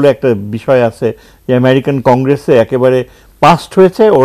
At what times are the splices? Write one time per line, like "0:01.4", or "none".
none